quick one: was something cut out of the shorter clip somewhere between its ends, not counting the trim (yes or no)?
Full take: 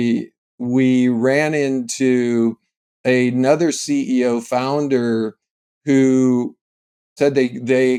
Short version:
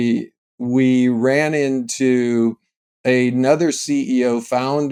no